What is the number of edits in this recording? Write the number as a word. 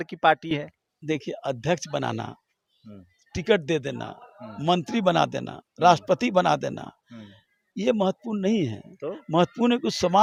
zero